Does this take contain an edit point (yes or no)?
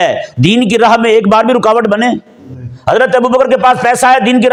no